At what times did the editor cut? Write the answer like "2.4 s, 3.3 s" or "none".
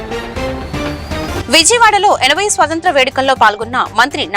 1.2 s